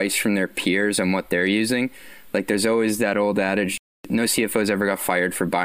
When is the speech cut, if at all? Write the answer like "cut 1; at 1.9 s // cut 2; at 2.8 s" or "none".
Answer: cut 1; at 4.0 s